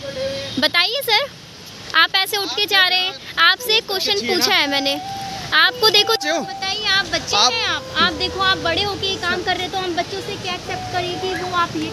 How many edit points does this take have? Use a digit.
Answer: 1